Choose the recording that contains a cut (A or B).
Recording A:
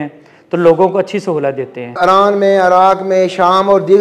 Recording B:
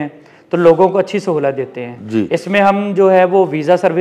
A